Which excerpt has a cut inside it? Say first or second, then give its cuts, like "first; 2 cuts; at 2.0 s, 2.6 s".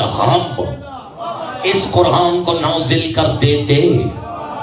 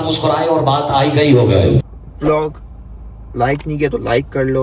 second; 1 cut; at 2.0 s